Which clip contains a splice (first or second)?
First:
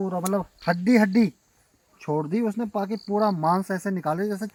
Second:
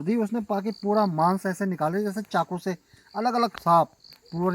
second